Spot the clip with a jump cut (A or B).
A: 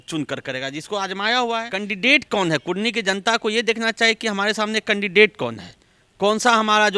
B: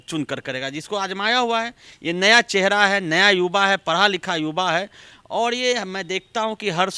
A